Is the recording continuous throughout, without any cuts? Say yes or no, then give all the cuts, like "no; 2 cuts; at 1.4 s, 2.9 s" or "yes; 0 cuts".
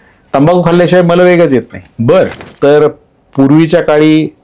no; 1 cut; at 2.5 s